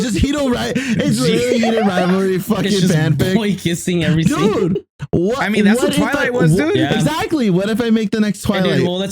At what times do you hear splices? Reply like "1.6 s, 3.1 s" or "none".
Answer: none